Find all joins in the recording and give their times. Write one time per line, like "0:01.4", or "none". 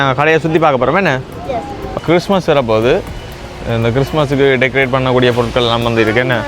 0:02.0